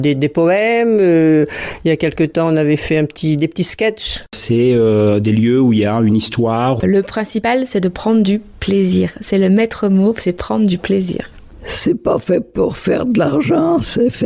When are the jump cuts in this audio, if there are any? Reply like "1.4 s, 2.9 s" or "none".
4.3 s, 6.8 s, 11.4 s